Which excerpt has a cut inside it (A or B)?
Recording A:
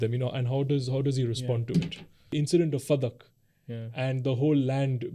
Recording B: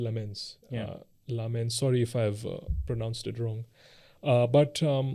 A